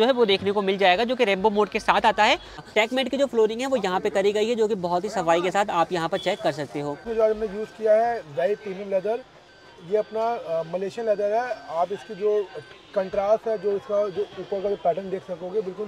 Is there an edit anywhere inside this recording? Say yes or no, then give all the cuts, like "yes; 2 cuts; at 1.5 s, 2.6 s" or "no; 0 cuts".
yes; 2 cuts; at 2.6 s, 7.0 s